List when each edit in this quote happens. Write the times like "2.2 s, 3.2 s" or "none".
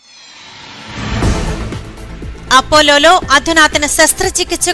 1.4 s